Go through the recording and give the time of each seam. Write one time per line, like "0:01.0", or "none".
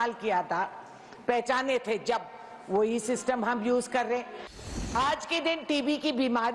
0:04.7